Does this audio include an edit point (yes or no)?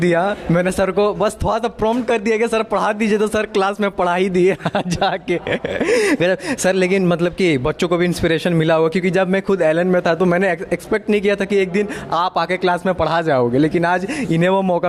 no